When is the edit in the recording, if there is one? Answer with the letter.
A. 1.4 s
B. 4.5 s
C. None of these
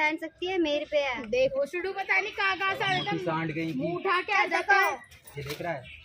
A